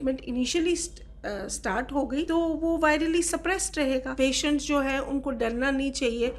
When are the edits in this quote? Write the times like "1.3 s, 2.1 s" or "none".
2.3 s, 4.1 s

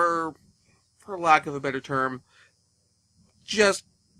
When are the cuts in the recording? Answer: none

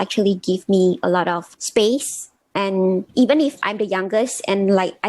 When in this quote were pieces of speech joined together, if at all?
1.5 s, 3.1 s

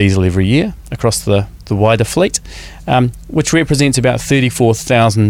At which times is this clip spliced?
none

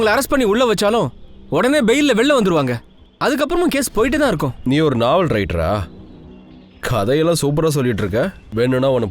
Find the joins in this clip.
4.5 s

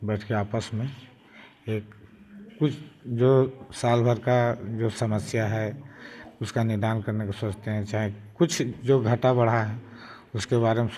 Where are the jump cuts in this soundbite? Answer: none

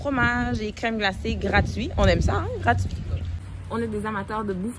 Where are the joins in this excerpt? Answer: 3.6 s

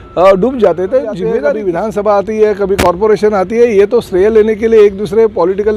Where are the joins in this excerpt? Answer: 1.4 s

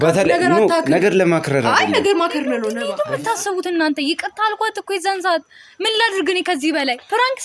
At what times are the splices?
2.8 s

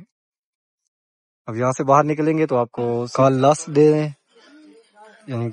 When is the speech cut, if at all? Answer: 3.1 s

